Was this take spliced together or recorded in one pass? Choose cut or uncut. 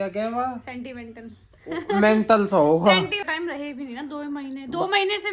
cut